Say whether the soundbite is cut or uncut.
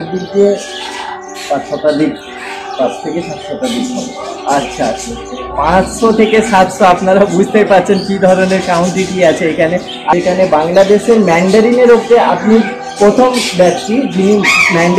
cut